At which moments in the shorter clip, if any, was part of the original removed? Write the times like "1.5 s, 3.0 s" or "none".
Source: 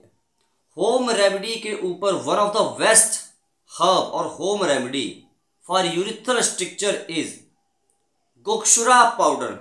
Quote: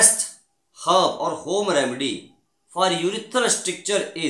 none

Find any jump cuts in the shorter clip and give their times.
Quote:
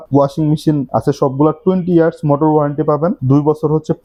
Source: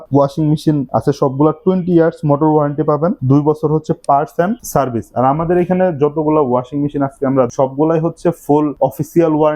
none

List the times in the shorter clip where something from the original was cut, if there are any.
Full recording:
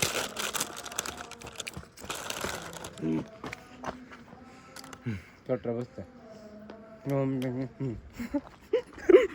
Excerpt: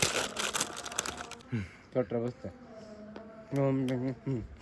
1.3 s

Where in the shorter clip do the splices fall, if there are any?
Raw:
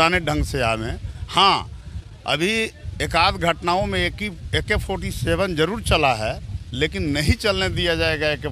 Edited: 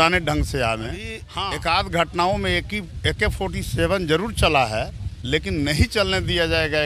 1.2 s

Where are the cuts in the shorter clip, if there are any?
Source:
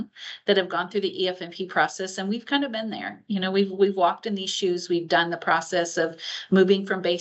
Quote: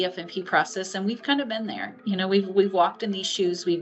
none

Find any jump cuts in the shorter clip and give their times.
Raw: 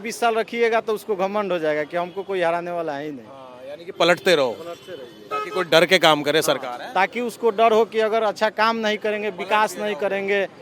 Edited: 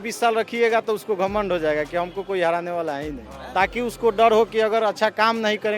3.4 s

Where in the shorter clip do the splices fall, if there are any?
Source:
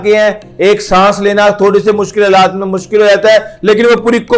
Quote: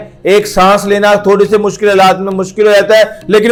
none

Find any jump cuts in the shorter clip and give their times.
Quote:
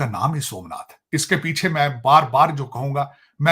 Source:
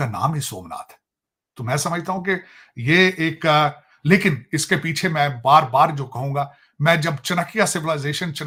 1.0 s

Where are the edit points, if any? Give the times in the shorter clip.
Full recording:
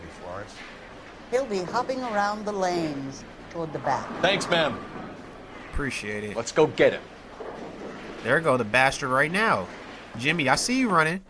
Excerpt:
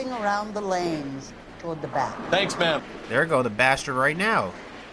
2.9 s

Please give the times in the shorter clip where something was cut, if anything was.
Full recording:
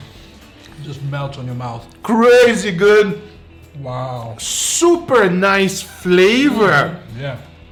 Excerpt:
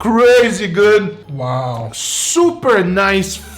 1.3 s

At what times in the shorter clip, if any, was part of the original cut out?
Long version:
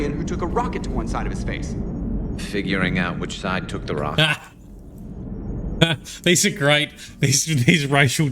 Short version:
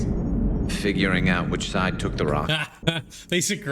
2.7 s

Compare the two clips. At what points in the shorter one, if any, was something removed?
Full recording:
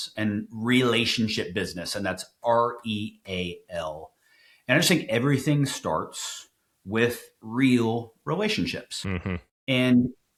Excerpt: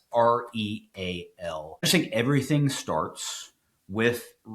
1.9 s

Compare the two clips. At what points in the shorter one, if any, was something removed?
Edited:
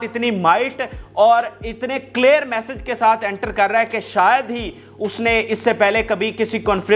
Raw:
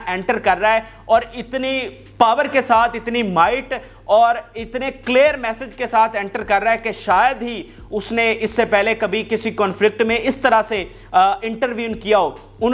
none

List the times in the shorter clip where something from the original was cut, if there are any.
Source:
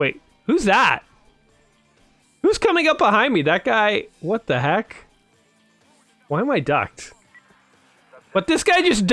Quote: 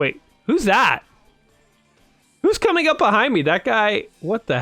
none

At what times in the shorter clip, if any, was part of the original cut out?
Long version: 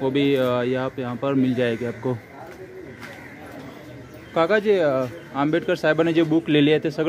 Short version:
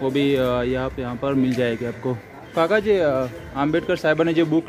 2.3 s

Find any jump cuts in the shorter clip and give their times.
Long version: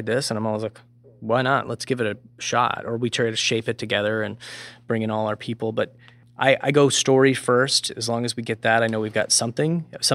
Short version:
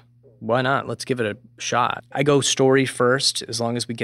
2.1 s

